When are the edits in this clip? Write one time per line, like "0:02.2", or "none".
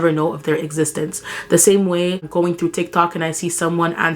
0:02.3